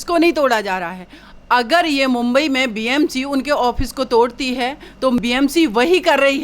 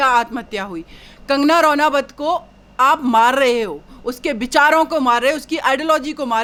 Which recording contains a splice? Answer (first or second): first